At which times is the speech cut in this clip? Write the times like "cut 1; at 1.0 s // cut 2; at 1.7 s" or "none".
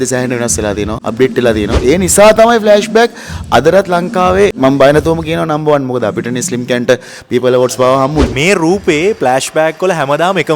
cut 1; at 1.0 s // cut 2; at 1.8 s // cut 3; at 4.6 s // cut 4; at 8.3 s